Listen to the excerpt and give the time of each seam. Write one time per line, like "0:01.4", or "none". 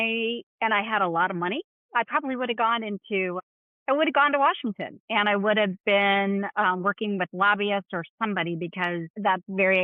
none